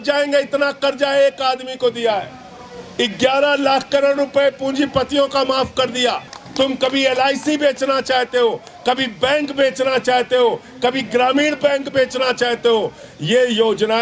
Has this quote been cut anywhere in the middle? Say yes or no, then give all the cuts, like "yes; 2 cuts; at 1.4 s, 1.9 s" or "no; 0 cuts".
yes; 1 cut; at 6.4 s